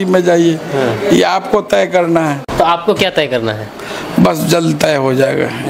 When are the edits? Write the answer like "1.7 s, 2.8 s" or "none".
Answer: 2.4 s

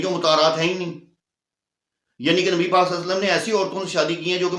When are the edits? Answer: none

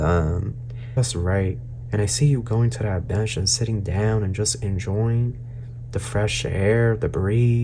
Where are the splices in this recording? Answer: 1.0 s

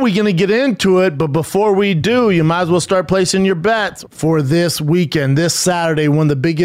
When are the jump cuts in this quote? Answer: 3.9 s

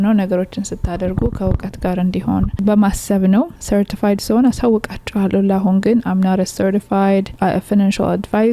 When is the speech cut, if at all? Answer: 7.3 s

